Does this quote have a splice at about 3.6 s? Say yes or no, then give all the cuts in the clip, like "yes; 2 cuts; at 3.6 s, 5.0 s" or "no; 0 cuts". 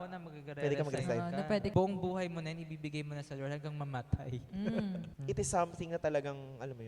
no; 2 cuts; at 1.7 s, 5.1 s